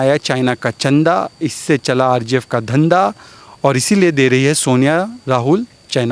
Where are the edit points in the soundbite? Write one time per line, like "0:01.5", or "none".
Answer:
none